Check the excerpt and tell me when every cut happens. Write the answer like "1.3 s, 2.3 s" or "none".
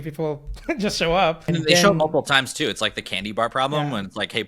1.5 s